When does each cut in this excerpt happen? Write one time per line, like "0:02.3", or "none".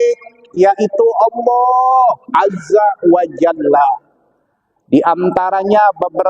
none